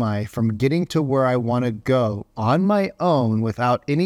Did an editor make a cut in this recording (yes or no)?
no